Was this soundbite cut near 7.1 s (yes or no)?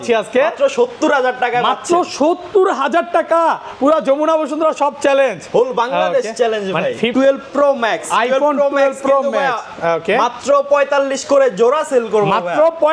yes